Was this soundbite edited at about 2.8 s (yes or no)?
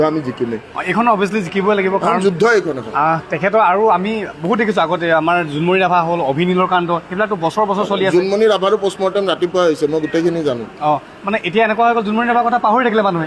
no